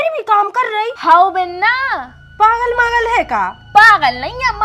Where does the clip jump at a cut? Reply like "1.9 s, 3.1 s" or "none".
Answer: 0.9 s